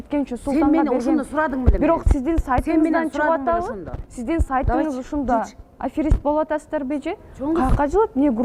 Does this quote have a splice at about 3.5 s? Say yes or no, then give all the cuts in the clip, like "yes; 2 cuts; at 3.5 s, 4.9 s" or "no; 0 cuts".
no; 0 cuts